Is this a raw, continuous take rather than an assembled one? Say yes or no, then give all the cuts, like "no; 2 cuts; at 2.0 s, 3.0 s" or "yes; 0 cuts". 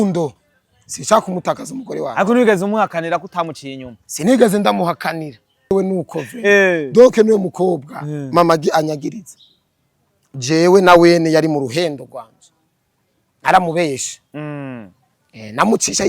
no; 1 cut; at 5.7 s